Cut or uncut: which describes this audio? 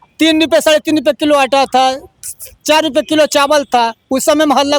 uncut